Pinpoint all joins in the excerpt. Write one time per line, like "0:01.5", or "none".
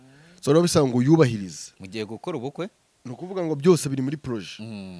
none